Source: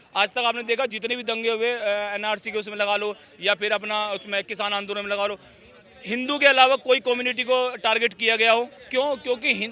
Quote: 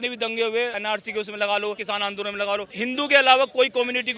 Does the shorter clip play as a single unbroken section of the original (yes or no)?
no